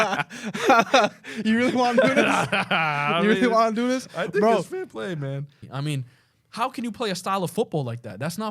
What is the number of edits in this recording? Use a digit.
1